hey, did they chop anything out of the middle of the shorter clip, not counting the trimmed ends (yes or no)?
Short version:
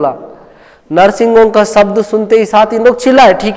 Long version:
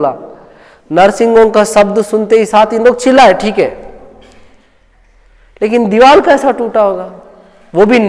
no